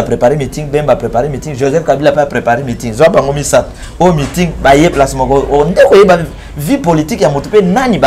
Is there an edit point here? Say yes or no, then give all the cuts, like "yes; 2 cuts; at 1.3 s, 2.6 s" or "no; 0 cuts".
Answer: no; 0 cuts